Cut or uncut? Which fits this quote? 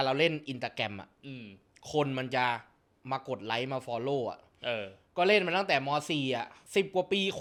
uncut